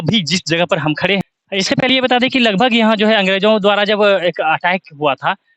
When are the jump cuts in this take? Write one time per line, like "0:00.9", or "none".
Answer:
0:01.2